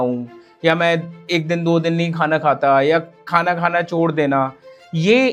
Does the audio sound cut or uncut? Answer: uncut